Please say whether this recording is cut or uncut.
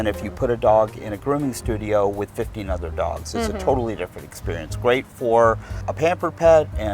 cut